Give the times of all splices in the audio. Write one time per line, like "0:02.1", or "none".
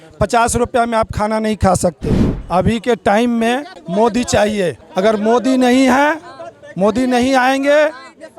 0:02.3
0:03.8
0:04.8

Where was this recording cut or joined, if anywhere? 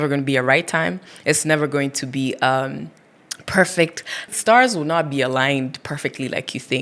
0:04.3

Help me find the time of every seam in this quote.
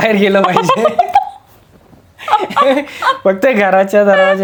none

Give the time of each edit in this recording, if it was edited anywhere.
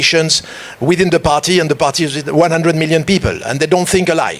none

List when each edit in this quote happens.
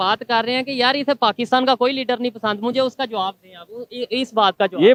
none

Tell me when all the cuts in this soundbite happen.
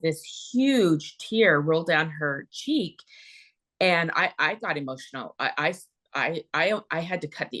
none

